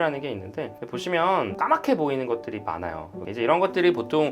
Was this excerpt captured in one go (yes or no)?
no